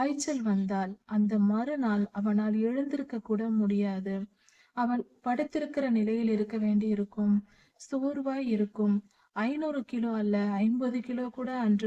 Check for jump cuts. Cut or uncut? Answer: cut